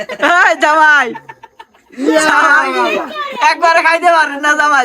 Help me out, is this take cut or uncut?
uncut